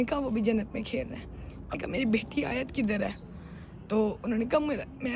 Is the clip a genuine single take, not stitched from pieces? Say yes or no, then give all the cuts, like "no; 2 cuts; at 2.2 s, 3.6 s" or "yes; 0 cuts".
no; 1 cut; at 1.7 s